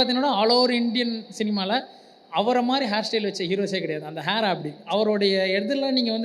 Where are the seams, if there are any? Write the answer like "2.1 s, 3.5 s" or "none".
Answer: 4.8 s